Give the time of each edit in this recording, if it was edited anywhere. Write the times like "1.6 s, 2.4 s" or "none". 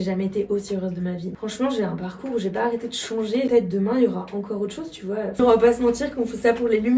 1.4 s, 3.5 s, 5.4 s